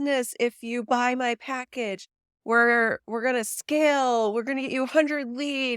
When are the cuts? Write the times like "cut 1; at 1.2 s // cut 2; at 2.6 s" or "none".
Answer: none